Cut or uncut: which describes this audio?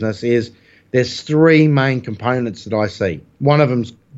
cut